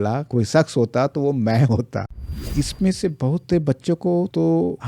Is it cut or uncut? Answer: cut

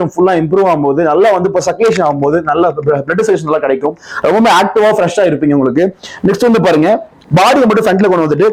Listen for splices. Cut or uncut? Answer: uncut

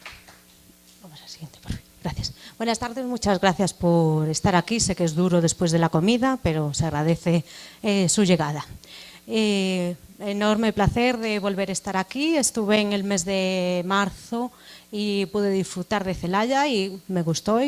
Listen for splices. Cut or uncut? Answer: cut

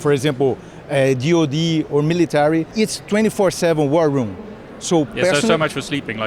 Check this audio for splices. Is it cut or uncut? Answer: uncut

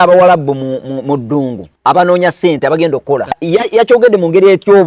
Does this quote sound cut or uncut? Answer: cut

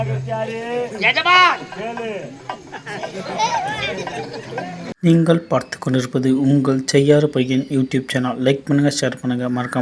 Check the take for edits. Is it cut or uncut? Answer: cut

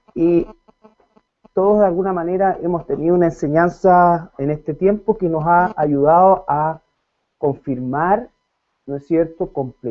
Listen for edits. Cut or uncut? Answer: uncut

